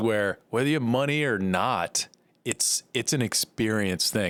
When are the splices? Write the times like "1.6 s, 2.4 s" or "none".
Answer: none